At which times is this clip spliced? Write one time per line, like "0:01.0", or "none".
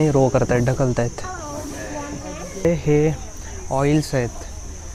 0:02.6